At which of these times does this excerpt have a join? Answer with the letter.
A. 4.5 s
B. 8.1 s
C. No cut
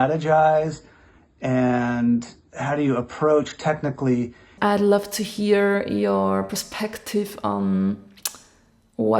A